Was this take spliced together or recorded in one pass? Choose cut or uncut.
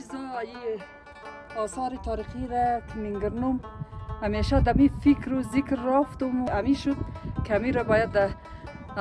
cut